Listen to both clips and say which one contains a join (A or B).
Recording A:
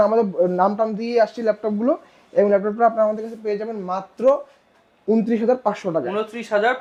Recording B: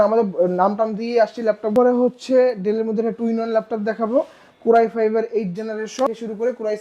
B